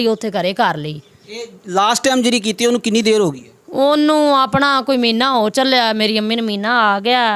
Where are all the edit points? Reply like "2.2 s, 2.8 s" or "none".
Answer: none

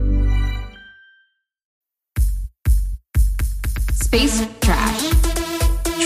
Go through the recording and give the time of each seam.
1.8 s

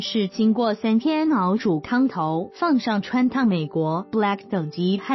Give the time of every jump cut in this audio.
none

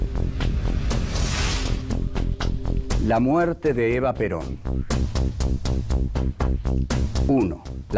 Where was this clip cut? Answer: 1.9 s

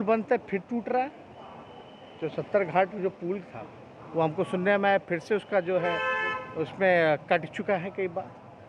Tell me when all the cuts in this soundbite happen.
none

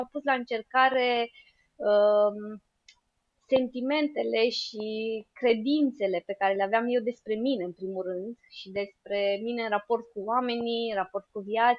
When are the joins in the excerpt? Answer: none

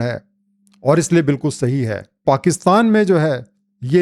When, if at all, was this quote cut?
2.2 s

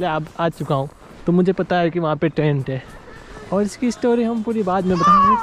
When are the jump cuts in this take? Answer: none

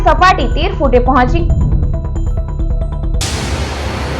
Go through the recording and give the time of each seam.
3.1 s

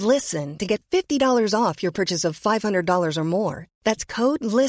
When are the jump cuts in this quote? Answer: none

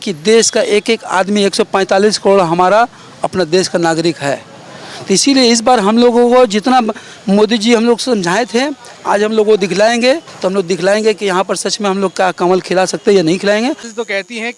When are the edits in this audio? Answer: none

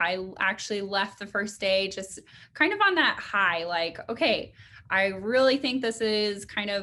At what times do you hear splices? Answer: none

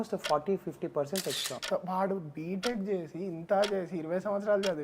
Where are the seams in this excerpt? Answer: 1.5 s

